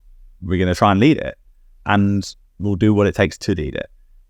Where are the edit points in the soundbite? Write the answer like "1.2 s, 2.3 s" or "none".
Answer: none